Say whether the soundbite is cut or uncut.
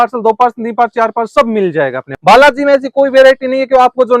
cut